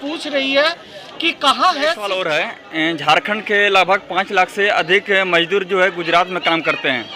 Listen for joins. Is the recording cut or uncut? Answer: cut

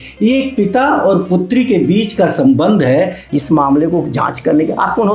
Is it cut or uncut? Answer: cut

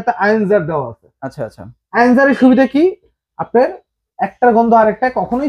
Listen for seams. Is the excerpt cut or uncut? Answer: uncut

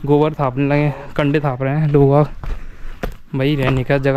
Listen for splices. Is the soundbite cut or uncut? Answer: uncut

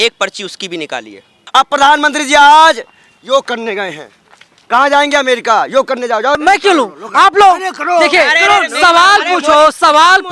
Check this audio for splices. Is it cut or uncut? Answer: cut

